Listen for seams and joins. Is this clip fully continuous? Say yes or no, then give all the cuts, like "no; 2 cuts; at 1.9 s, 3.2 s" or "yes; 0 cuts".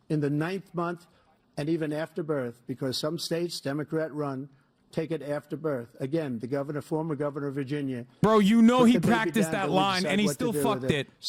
yes; 0 cuts